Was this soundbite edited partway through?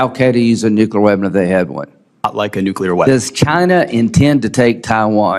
yes; 1 cut; at 2.3 s

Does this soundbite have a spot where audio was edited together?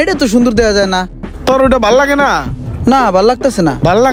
no; 0 cuts

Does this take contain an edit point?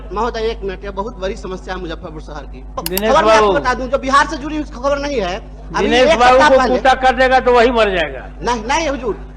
yes; 1 cut; at 2.8 s

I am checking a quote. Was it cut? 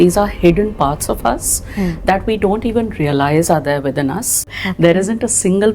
yes; 1 cut; at 4.6 s

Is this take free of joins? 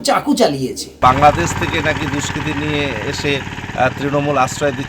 no; 1 cut; at 0.9 s

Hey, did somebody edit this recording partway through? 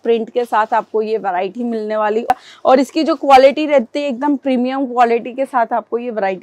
yes; 1 cut; at 2.3 s

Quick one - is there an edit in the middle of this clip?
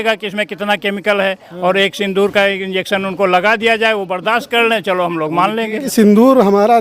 yes; 1 cut; at 5.9 s

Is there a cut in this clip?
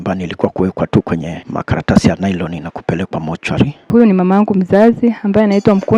yes; 2 cuts; at 1.4 s, 3.9 s

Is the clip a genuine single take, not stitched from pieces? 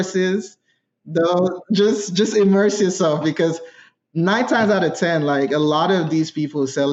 yes; 0 cuts

